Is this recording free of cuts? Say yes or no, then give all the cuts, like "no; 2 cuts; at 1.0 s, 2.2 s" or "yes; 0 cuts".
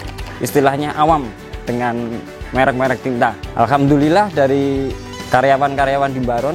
yes; 0 cuts